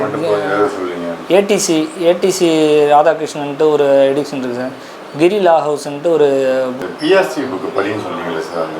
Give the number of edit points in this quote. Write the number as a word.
one